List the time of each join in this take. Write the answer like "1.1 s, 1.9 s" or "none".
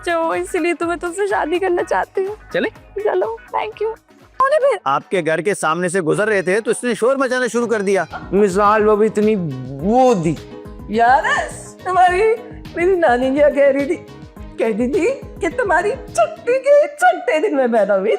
4.4 s, 8.1 s